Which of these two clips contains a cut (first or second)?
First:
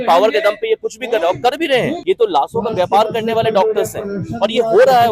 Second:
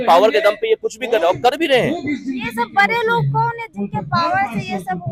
first